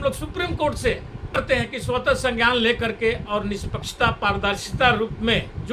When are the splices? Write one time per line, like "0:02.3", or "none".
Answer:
0:01.4